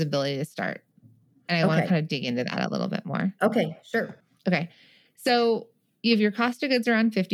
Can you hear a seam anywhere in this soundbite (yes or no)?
yes